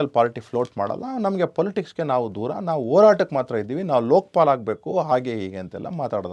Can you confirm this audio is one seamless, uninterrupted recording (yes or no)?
yes